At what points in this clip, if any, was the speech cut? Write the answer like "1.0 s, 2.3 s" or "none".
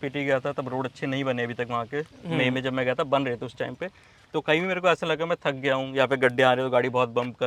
none